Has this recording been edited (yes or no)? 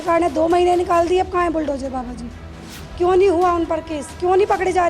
no